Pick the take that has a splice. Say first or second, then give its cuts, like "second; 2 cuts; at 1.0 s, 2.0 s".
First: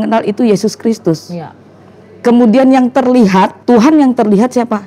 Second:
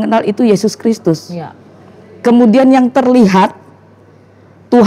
first; 1 cut; at 3.6 s